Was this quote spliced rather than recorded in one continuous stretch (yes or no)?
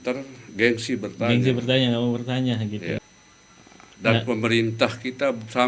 yes